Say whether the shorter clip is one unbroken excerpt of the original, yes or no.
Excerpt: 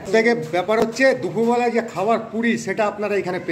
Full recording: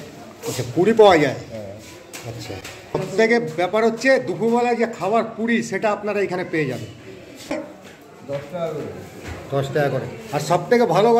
yes